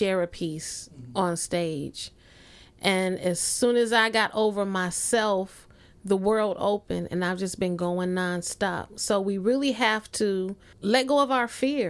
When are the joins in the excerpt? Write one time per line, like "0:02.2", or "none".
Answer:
0:10.6